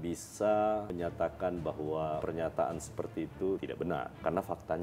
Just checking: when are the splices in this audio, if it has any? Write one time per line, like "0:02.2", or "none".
0:00.9
0:02.2
0:03.7